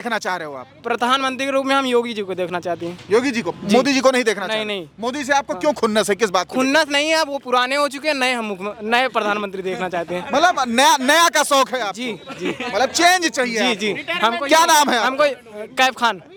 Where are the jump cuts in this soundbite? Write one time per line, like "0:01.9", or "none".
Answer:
none